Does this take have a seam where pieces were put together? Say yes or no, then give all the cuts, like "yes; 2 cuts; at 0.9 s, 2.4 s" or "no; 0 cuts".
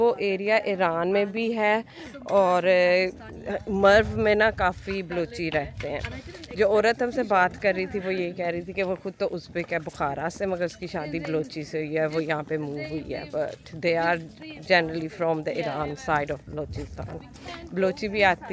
no; 0 cuts